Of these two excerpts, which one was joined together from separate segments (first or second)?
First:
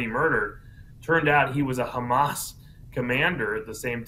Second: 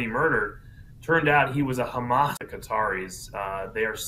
first